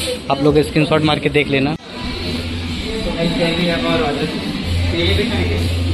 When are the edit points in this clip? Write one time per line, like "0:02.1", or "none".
0:01.8